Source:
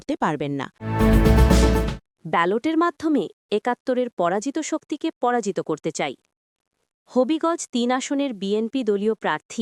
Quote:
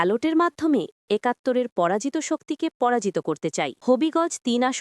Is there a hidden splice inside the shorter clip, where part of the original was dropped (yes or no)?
yes